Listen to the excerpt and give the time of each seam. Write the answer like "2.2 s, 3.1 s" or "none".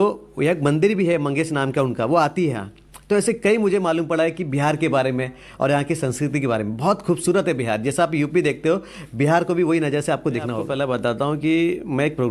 10.6 s

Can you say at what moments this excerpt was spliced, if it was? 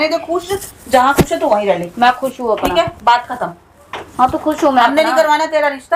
none

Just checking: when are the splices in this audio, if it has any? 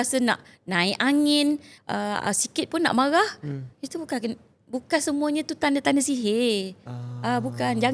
1.7 s

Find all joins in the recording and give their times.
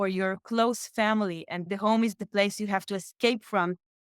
1.7 s

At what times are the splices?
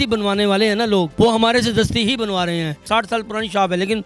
1.1 s, 2.8 s

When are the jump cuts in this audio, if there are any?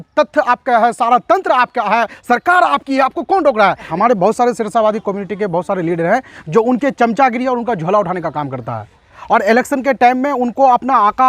3.9 s

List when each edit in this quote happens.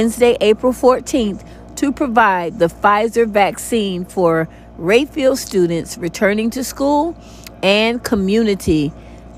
none

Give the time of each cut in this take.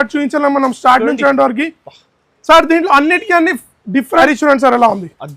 4.2 s

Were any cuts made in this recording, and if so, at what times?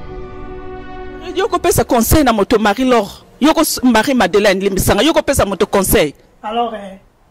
1.1 s

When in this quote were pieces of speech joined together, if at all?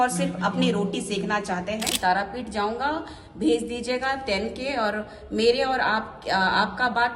1.9 s

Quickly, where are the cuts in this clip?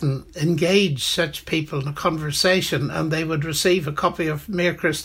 none

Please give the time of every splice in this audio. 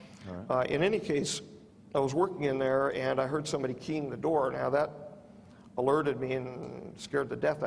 none

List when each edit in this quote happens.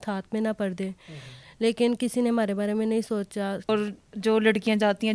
3.6 s

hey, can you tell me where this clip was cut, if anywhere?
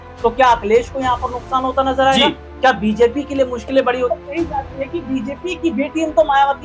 4.2 s

